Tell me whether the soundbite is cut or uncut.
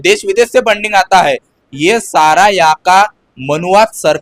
uncut